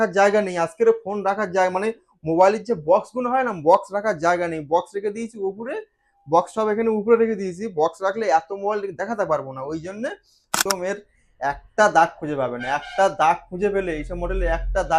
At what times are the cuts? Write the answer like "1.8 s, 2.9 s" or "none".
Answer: 10.6 s